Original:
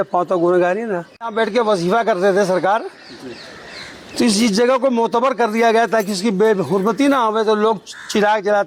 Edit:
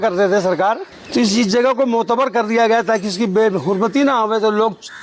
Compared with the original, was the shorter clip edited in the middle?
yes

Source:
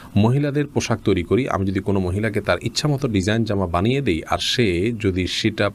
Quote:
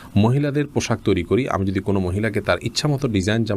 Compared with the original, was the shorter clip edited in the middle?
no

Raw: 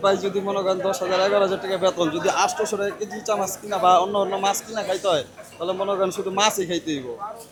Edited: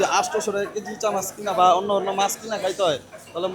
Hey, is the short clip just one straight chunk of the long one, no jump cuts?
yes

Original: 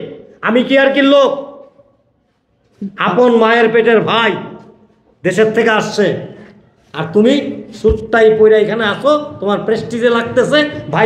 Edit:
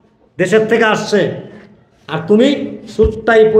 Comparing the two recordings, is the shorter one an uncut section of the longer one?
yes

